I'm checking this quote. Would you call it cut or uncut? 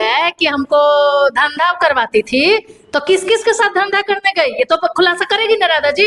uncut